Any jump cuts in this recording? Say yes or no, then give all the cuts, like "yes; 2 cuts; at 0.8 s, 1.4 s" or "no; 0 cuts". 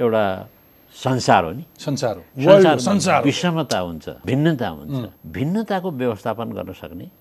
yes; 2 cuts; at 4.1 s, 5.2 s